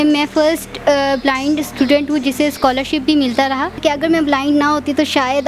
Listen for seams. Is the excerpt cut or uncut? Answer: cut